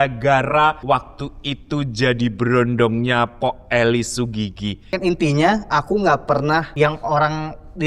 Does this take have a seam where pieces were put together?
yes; 3 cuts; at 0.8 s, 4.9 s, 6.7 s

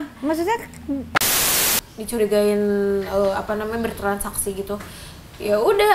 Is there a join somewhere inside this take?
yes; 1 cut; at 1.4 s

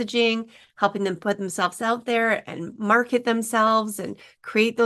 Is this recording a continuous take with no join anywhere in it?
yes; 0 cuts

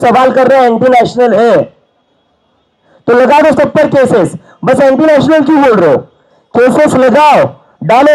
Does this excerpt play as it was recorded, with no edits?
yes; 0 cuts

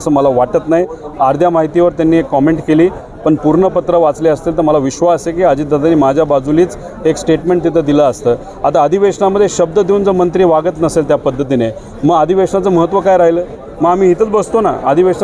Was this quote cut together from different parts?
no; 0 cuts

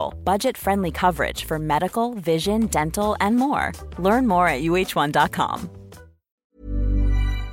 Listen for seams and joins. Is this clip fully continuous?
no; 1 cut; at 6.5 s

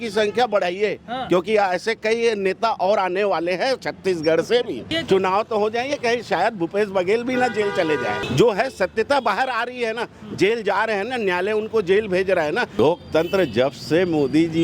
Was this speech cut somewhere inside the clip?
yes; 3 cuts; at 4.9 s, 8.2 s, 12.8 s

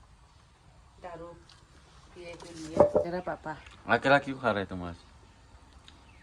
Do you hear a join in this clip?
yes; 1 cut; at 3.1 s

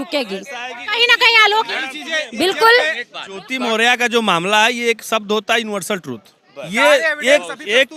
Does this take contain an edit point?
no; 0 cuts

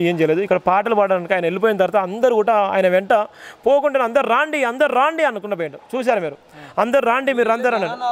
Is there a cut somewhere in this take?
no; 0 cuts

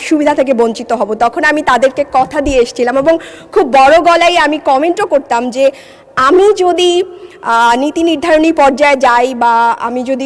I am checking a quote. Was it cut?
no; 0 cuts

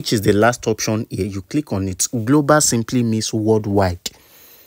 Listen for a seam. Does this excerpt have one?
no; 0 cuts

